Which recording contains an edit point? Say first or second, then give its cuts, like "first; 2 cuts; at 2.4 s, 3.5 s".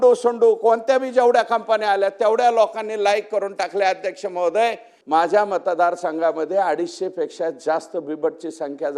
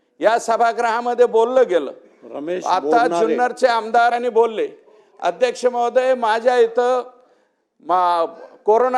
first; 1 cut; at 4.9 s